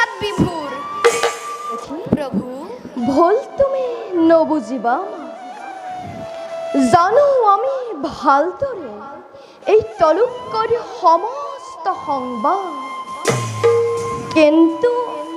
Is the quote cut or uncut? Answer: cut